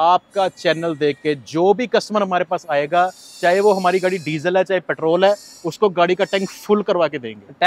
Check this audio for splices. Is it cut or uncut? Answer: uncut